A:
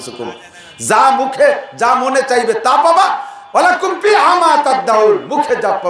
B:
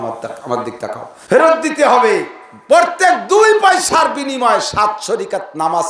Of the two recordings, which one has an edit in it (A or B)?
B